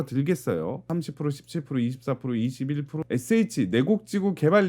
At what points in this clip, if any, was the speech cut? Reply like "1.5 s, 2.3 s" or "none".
0.9 s, 3.0 s